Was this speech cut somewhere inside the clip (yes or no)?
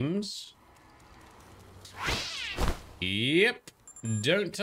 no